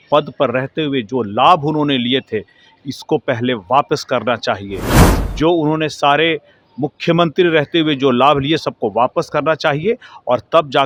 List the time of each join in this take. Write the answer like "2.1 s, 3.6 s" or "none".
none